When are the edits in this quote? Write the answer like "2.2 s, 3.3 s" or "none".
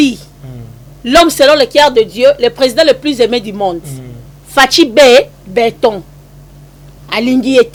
none